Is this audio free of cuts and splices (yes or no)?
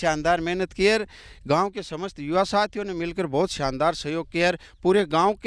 yes